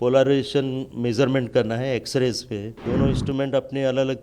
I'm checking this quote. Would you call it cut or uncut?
cut